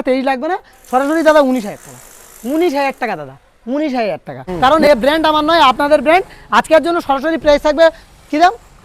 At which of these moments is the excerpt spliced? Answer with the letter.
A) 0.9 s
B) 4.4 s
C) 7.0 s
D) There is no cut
B